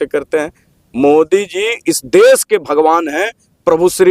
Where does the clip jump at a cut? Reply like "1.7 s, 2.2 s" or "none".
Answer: none